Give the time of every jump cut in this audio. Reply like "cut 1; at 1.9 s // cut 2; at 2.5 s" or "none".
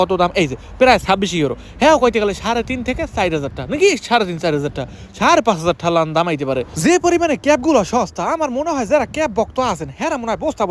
none